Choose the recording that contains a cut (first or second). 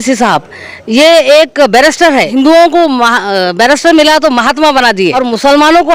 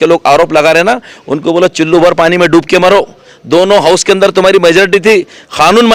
first